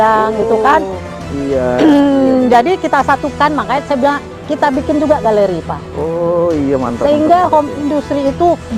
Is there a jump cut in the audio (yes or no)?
no